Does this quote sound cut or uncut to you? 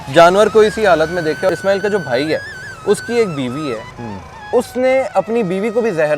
cut